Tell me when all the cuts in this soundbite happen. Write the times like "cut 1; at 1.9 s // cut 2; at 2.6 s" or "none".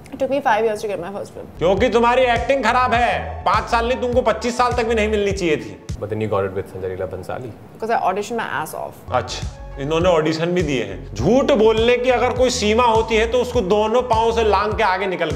none